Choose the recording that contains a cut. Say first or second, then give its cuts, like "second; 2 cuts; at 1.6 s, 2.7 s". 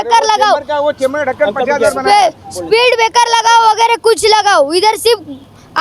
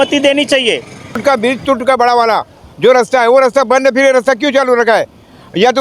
second; 1 cut; at 1.2 s